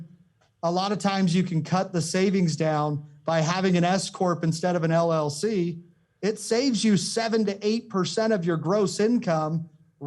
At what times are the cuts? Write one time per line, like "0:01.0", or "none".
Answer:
none